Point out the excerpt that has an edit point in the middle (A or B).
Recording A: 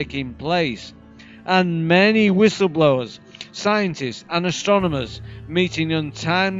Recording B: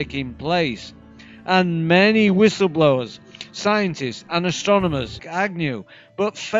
A